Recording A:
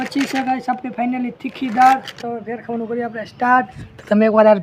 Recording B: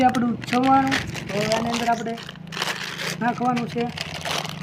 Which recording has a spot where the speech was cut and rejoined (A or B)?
A